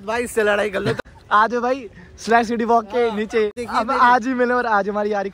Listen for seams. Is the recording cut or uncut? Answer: cut